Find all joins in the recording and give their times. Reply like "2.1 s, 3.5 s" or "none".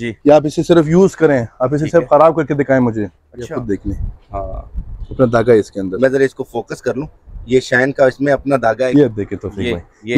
3.5 s, 8.8 s